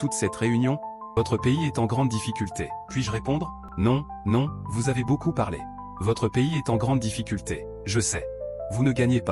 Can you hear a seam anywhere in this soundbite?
yes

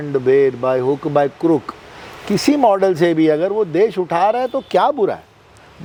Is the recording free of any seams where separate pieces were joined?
yes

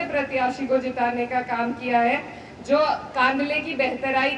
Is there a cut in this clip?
no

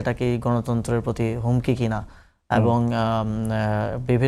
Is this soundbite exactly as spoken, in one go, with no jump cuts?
yes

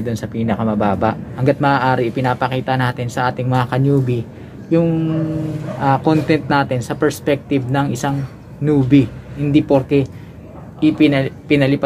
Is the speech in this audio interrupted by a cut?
yes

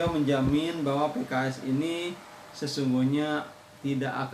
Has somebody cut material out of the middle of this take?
no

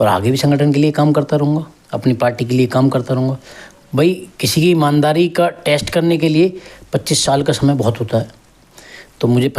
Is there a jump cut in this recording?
no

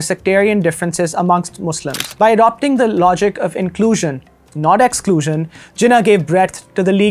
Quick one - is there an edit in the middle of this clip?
yes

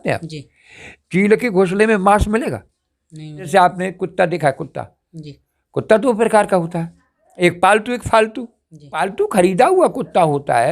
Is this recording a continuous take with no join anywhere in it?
no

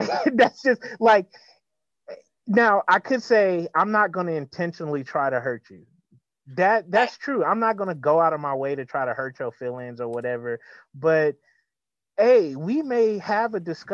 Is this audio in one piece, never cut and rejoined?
yes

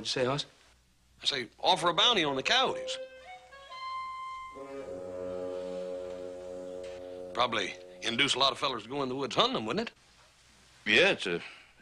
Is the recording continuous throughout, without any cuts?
no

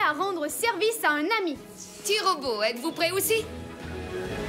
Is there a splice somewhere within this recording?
yes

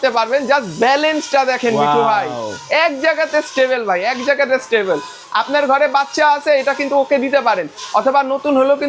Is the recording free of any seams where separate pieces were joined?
yes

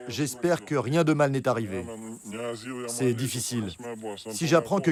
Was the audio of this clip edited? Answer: no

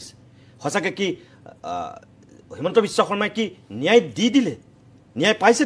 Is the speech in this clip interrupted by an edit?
no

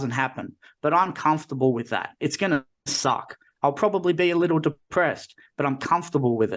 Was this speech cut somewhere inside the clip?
no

